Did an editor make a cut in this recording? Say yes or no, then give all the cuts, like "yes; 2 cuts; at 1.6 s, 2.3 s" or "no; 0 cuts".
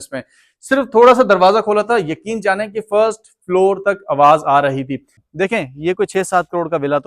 yes; 1 cut; at 5.2 s